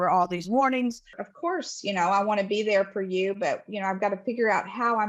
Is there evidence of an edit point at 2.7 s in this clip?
no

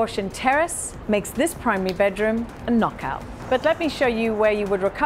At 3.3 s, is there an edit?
yes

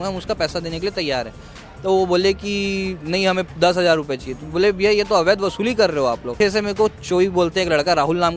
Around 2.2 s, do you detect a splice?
no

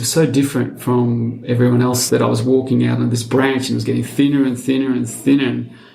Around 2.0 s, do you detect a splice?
yes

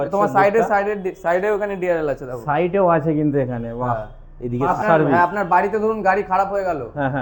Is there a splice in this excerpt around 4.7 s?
yes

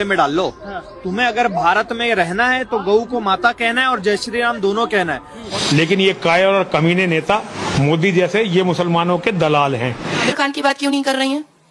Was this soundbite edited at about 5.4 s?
yes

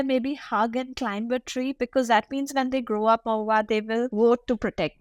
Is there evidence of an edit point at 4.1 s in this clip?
yes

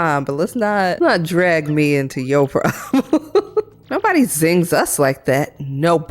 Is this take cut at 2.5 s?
no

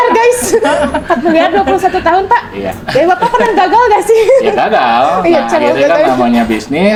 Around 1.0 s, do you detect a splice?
no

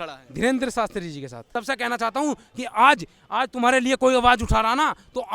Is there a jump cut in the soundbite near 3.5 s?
no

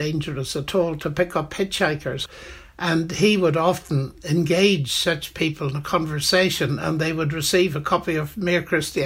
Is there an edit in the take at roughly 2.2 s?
yes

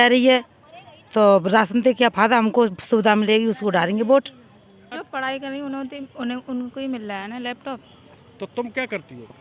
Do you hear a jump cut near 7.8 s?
no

